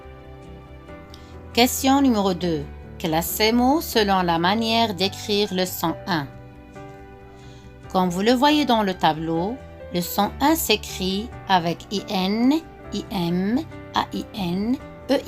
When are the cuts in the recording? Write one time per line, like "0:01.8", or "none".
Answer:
0:01.5
0:06.3
0:07.8